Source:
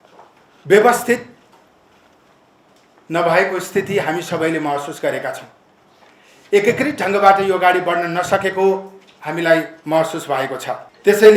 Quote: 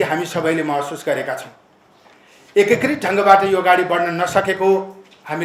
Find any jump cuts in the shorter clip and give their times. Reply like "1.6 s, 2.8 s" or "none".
none